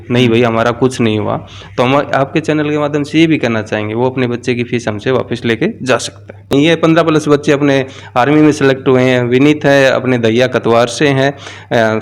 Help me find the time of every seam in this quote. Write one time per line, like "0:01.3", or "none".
0:06.5